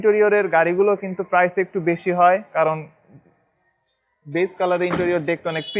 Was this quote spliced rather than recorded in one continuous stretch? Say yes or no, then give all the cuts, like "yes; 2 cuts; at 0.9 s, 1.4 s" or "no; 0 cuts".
no; 0 cuts